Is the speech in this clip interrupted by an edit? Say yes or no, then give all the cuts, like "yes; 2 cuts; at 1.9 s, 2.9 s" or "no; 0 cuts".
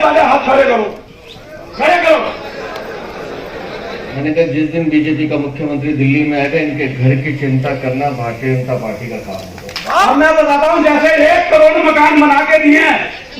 yes; 2 cuts; at 4.2 s, 9.9 s